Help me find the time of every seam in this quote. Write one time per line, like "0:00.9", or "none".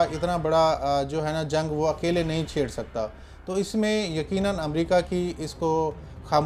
none